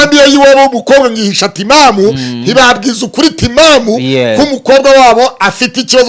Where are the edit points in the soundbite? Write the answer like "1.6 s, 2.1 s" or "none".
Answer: none

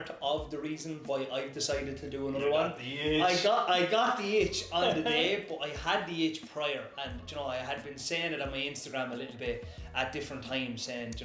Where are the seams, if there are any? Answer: none

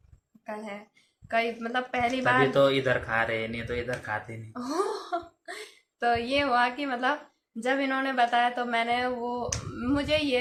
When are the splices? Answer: none

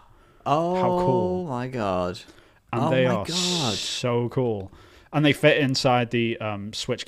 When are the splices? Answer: none

